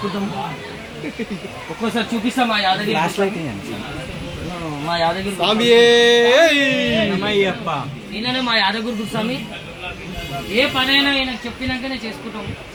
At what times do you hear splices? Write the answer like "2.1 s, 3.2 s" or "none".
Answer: none